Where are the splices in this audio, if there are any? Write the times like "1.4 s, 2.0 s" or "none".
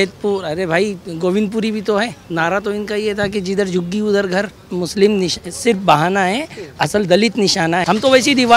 2.2 s, 4.7 s, 7.8 s